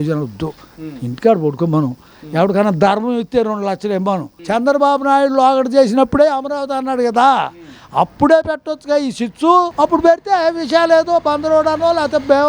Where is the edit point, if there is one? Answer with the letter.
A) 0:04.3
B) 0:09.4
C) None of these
A